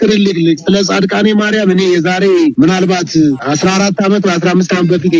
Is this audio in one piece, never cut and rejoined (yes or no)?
no